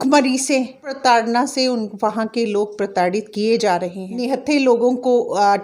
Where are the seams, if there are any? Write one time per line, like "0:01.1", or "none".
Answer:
0:01.0
0:04.1